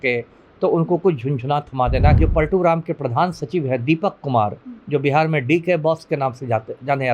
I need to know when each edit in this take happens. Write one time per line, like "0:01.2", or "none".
0:02.2